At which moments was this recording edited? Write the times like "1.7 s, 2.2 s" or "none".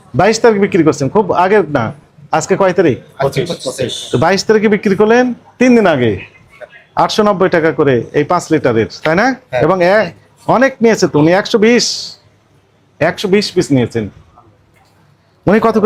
none